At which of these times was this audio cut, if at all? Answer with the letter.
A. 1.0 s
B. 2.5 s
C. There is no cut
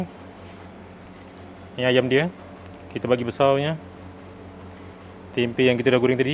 A